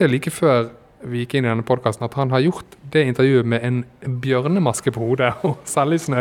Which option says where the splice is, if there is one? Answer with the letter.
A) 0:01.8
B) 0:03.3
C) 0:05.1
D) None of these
D